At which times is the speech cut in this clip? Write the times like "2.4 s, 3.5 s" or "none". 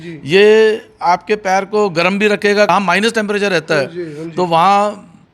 2.7 s

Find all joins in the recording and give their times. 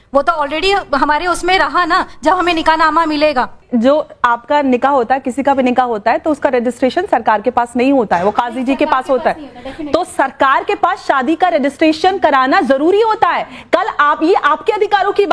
3.6 s

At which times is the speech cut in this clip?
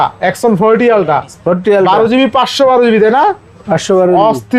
none

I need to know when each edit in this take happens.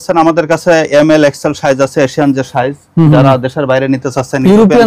none

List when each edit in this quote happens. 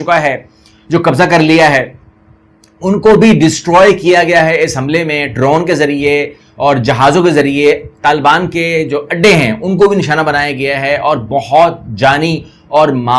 none

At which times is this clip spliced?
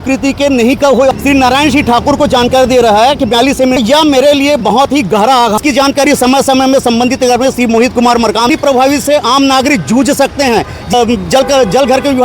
1.1 s, 3.8 s, 5.6 s, 8.5 s, 10.9 s

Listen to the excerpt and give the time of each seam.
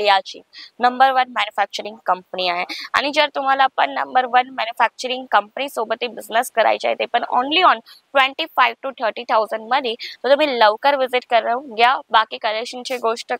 none

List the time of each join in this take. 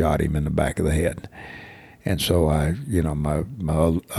none

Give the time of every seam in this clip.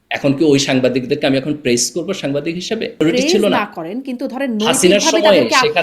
3.1 s

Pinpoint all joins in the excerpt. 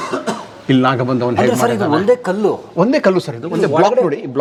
none

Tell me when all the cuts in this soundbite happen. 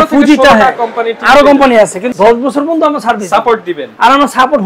2.1 s

